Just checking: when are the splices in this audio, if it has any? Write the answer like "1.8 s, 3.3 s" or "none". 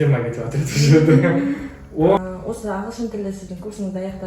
2.2 s

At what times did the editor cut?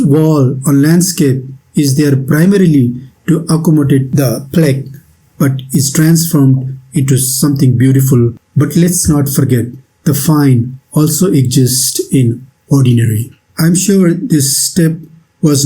4.1 s, 8.4 s, 13.3 s

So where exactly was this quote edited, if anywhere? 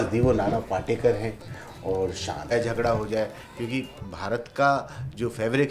2.5 s

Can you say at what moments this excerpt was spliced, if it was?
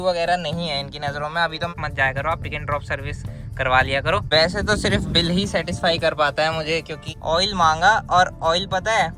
1.7 s, 4.2 s, 7.1 s

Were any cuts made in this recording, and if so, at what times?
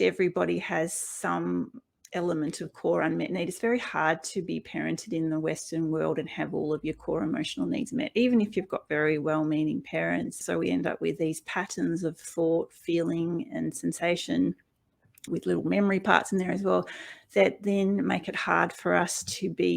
10.4 s, 15.3 s

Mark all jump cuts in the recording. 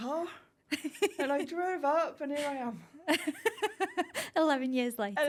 none

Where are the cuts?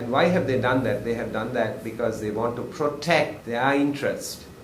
3.4 s

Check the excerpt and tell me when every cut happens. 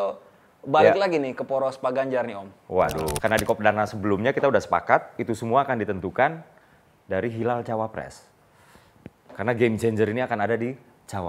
3.2 s

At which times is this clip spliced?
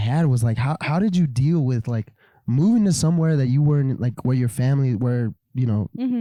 none

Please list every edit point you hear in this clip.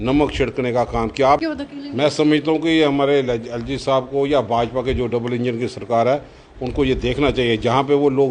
1.4 s

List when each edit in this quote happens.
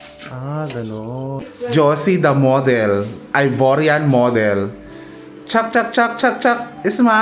1.5 s

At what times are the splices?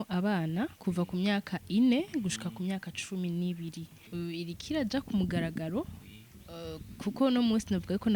4.0 s

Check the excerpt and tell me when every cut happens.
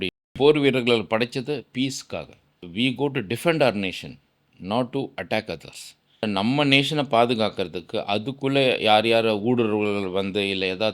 2.6 s, 6.2 s

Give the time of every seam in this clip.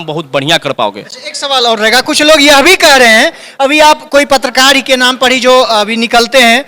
none

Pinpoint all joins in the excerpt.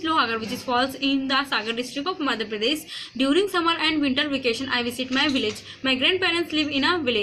none

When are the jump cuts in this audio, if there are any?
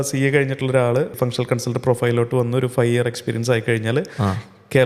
1.1 s

